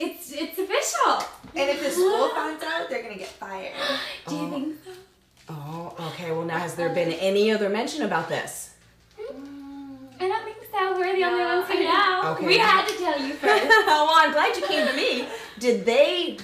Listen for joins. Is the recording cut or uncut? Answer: uncut